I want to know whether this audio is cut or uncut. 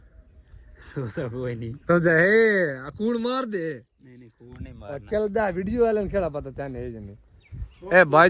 uncut